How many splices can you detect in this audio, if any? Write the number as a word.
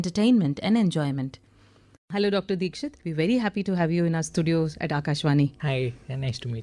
one